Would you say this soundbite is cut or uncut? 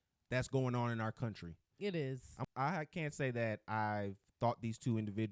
cut